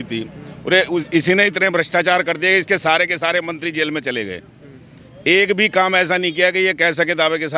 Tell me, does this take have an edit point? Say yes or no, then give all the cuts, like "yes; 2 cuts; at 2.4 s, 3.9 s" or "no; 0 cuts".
no; 0 cuts